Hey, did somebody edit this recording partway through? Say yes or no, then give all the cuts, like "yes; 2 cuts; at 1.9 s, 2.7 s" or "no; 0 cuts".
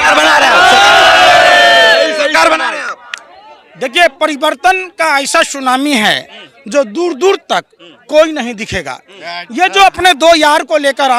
no; 0 cuts